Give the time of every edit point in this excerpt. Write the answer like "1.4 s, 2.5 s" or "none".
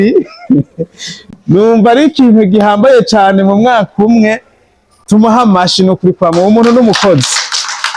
none